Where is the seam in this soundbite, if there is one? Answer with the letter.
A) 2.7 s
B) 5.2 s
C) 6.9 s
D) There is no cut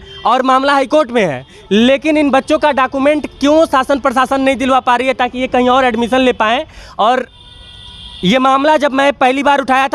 D